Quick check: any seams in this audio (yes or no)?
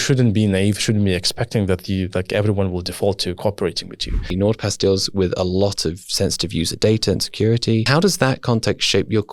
yes